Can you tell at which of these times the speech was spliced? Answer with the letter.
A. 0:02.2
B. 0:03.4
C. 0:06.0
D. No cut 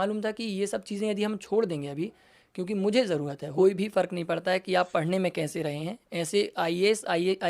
B